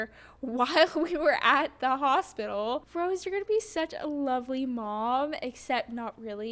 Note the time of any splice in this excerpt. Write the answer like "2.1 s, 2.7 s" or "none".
2.9 s